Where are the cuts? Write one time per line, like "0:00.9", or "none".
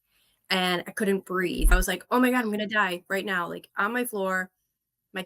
0:01.7